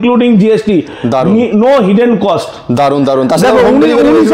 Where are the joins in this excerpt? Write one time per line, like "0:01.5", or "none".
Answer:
none